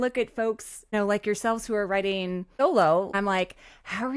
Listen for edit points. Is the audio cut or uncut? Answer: cut